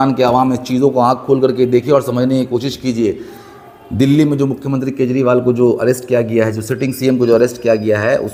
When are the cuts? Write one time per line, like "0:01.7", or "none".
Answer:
none